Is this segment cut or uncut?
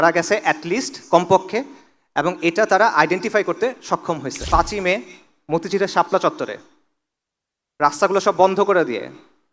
cut